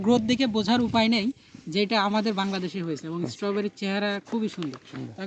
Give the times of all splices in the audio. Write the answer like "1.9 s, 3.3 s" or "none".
none